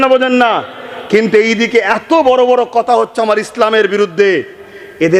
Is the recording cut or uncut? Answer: uncut